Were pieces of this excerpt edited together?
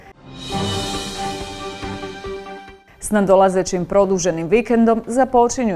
no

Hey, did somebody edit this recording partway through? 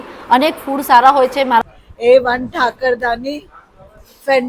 yes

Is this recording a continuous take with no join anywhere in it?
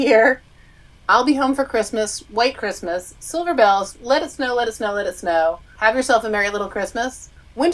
yes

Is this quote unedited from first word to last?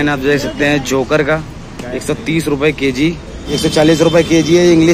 no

